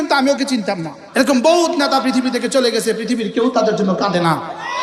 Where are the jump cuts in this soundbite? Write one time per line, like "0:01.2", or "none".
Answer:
0:00.9